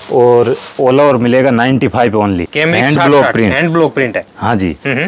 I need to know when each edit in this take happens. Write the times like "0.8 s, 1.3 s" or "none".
2.5 s